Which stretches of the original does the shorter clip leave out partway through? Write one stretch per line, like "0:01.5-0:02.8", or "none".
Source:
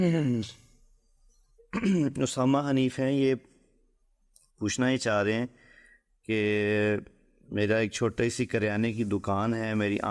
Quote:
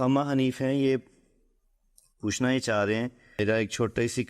0:05.6-0:07.5